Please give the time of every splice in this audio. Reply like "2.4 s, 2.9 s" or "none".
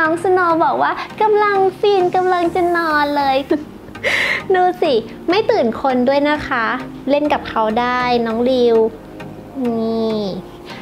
3.4 s

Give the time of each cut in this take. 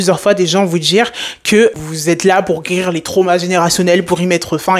1.7 s

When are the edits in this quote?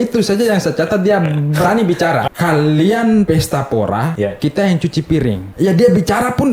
2.2 s, 3.3 s, 4.1 s, 5.5 s

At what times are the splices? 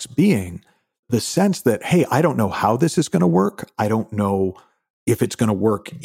1.0 s

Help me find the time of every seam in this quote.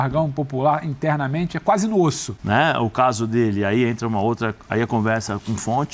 2.3 s

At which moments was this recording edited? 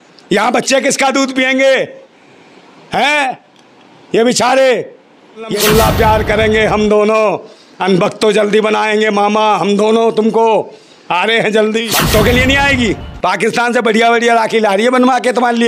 5.5 s, 11.9 s

